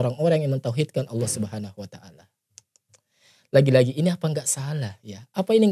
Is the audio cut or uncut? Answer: uncut